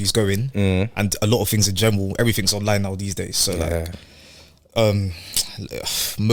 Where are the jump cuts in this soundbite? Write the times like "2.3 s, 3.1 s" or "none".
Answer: none